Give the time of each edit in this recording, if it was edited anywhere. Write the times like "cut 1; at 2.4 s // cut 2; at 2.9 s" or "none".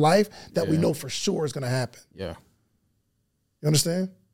none

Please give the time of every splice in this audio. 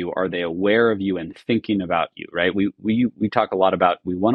none

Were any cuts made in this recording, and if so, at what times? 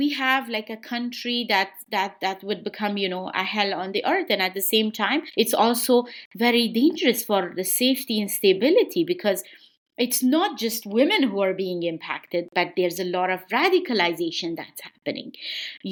none

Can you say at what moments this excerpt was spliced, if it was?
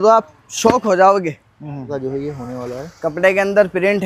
cut 1; at 1.9 s

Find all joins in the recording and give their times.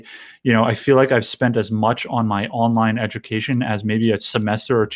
none

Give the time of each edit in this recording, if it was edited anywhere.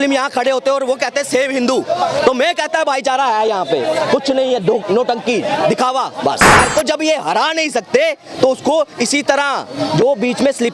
cut 1; at 6.6 s

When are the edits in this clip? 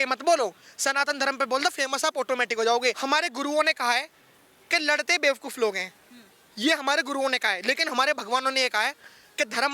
cut 1; at 3.0 s

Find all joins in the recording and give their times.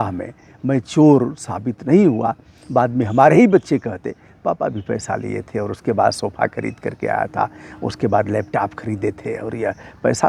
none

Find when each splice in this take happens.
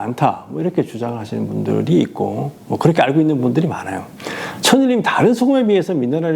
none

